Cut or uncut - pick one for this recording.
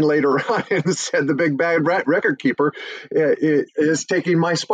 uncut